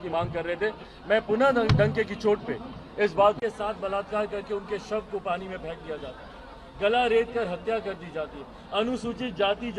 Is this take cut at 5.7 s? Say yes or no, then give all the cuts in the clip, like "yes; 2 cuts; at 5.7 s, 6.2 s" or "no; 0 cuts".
no; 1 cut; at 3.4 s